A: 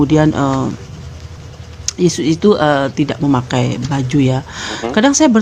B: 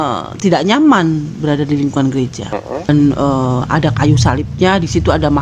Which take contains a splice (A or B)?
B